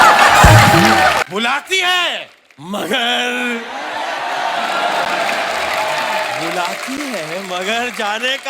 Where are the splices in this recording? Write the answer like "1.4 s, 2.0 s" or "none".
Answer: 1.2 s